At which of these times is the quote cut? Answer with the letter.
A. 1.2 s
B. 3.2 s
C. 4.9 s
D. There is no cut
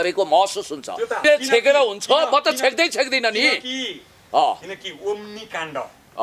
A